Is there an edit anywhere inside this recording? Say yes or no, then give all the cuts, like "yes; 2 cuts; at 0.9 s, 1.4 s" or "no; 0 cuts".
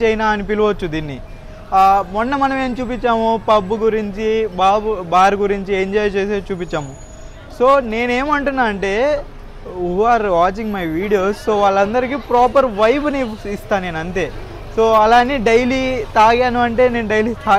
no; 0 cuts